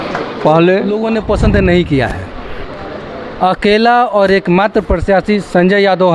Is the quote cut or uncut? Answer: cut